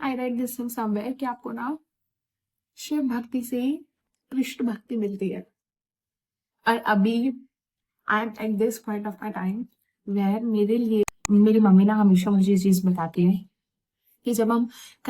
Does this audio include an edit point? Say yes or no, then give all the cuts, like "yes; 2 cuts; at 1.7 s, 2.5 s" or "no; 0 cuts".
yes; 1 cut; at 11.2 s